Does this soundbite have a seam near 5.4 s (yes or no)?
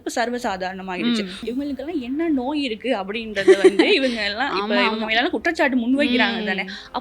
no